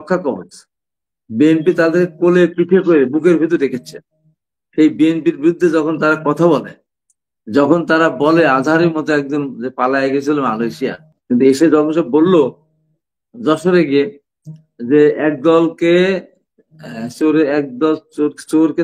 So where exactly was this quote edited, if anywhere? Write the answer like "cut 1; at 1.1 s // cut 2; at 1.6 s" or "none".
cut 1; at 11.1 s